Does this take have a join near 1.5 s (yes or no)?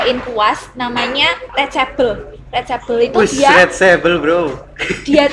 yes